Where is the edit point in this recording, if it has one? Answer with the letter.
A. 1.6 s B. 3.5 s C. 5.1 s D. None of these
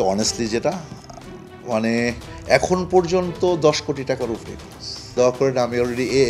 C